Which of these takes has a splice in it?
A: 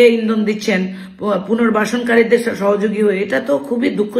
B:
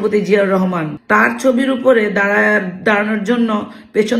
B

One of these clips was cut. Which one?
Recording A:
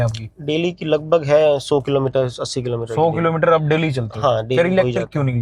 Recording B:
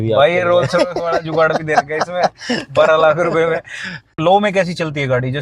B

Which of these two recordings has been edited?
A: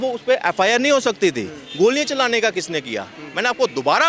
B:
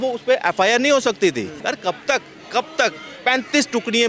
B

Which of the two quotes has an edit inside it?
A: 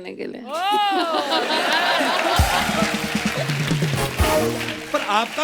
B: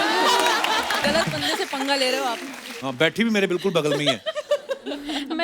B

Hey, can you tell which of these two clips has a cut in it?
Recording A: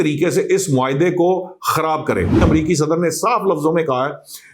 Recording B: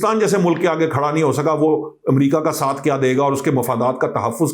A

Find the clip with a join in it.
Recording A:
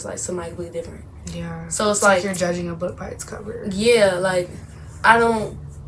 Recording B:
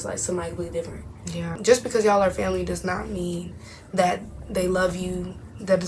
B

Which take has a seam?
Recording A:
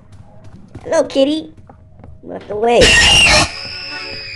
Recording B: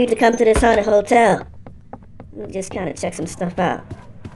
A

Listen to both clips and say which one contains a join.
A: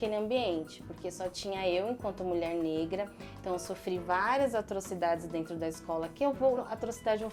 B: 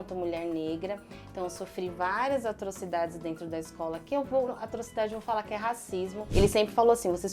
B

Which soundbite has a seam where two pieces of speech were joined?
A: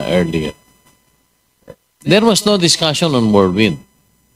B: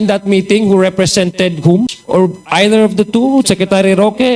B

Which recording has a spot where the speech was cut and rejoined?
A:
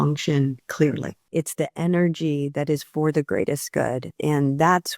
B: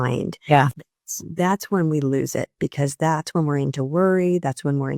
A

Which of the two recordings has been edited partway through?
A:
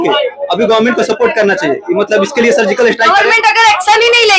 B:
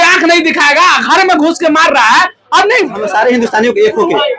B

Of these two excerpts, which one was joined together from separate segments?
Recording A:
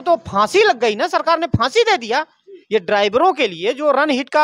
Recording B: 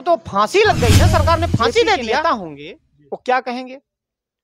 B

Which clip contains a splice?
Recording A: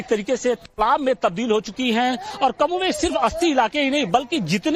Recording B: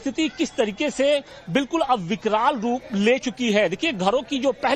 B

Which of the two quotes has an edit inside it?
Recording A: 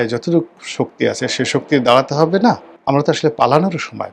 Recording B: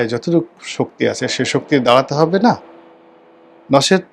A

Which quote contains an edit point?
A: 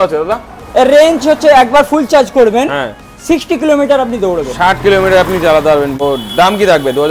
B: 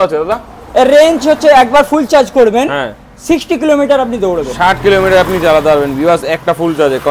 A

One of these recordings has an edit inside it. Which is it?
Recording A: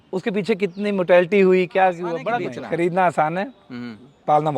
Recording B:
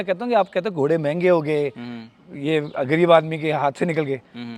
A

